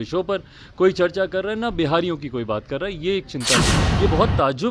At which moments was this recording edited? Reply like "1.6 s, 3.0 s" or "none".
3.8 s